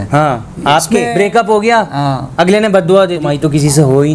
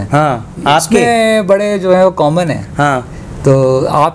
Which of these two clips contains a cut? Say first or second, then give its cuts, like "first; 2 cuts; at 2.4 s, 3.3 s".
first; 2 cuts; at 1.1 s, 3.2 s